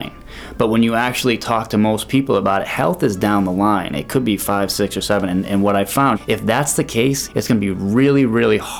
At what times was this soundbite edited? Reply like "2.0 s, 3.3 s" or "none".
6.2 s, 7.2 s